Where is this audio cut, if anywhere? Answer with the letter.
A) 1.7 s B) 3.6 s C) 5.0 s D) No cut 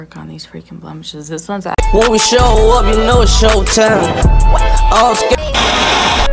A